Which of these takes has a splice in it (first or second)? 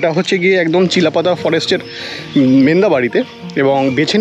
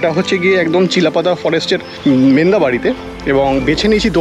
second